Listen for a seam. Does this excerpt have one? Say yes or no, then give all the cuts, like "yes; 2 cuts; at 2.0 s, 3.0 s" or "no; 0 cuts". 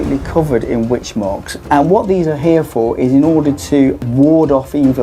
yes; 1 cut; at 4.0 s